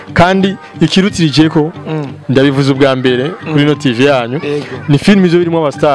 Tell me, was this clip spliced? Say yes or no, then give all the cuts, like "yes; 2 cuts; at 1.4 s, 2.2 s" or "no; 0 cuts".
no; 0 cuts